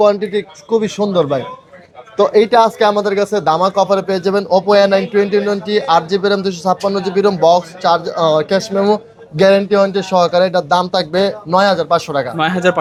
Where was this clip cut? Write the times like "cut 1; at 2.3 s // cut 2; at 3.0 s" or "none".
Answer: none